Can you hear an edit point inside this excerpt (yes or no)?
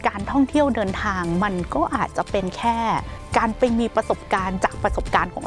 yes